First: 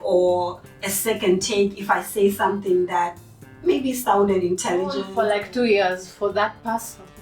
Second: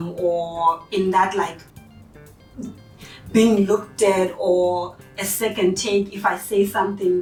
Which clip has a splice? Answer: first; 1 cut; at 5.1 s

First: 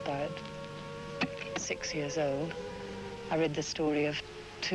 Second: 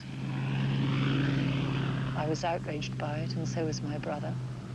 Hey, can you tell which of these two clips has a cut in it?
first; 1 cut; at 3.7 s

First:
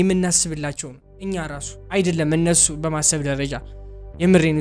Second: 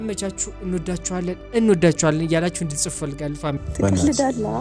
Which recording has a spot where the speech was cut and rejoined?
second; 1 cut; at 3.7 s

